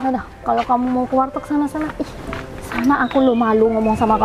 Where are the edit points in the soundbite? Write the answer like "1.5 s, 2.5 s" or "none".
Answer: none